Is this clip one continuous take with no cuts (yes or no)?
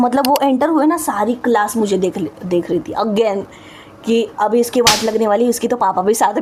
yes